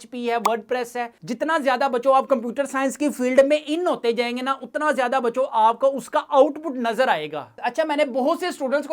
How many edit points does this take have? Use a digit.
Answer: 2